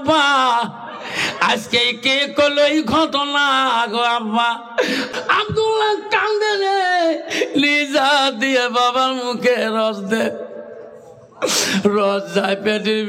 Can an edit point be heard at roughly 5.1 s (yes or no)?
yes